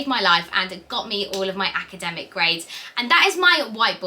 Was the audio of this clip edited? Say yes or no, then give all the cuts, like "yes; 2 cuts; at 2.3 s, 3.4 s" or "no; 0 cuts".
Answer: no; 0 cuts